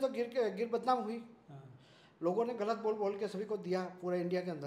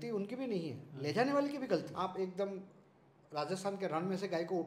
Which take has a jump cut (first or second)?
second